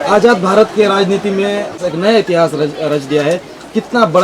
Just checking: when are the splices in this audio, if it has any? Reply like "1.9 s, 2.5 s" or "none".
1.8 s